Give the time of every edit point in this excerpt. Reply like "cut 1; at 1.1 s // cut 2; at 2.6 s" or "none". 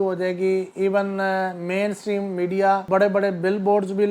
cut 1; at 2.8 s

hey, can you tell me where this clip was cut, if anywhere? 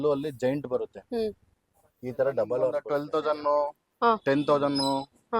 cut 1; at 2.9 s

